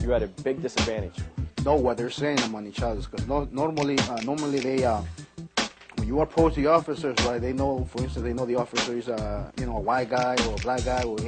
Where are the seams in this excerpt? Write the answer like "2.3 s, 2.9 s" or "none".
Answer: none